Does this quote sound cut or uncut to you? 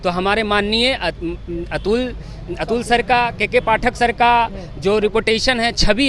uncut